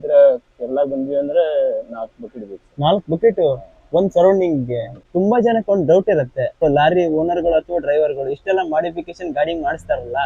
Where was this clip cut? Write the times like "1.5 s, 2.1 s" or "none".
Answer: 5.1 s, 6.6 s